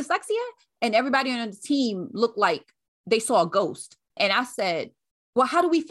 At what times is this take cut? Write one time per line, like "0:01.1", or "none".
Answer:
0:04.1